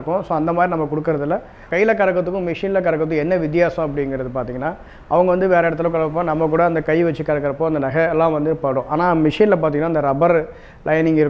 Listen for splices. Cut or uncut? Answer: cut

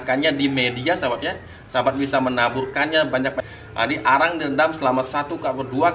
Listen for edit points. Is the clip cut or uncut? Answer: cut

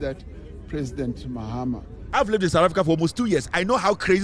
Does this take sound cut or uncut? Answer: cut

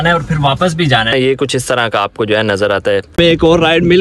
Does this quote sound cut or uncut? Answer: cut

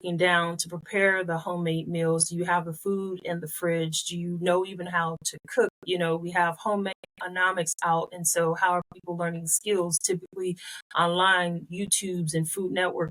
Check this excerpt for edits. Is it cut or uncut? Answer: uncut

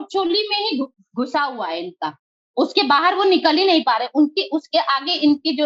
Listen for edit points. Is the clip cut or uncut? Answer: uncut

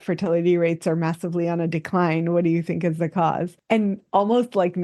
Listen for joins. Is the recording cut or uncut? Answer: cut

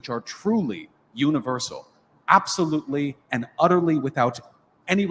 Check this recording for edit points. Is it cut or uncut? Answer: uncut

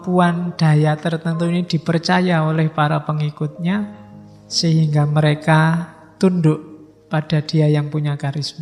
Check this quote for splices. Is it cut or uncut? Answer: uncut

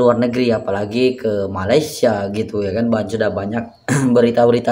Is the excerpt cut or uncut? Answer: uncut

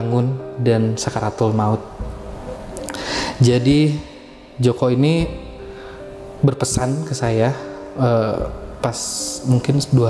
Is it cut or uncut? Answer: uncut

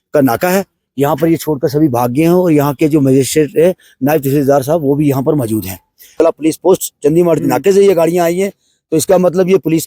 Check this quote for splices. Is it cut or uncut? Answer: cut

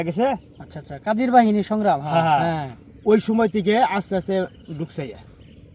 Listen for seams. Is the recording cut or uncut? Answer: uncut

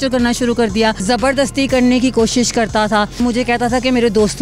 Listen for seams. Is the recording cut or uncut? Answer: cut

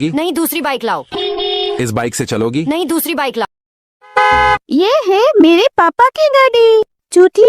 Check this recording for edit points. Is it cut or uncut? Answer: cut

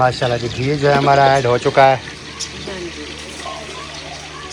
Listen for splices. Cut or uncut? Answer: uncut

